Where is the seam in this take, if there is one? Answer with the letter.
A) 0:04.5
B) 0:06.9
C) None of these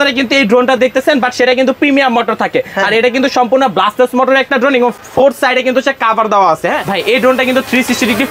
B